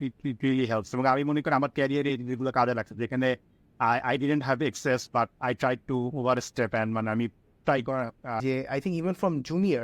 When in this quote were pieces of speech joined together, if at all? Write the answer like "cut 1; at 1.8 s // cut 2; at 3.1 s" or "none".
cut 1; at 8.4 s

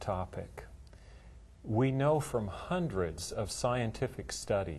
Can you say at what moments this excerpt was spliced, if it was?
cut 1; at 2.6 s

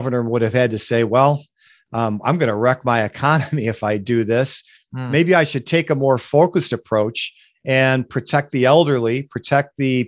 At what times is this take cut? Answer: none

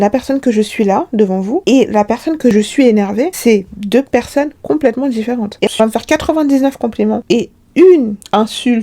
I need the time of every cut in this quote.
cut 1; at 2.5 s // cut 2; at 5.7 s

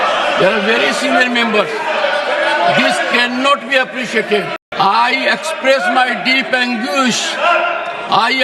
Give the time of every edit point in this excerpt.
cut 1; at 4.6 s

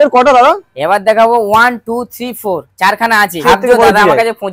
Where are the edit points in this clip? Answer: cut 1; at 3.4 s

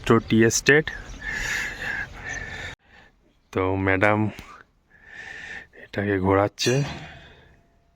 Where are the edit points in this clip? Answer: cut 1; at 2.7 s

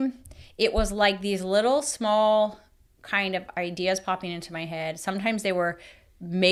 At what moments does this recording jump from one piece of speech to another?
none

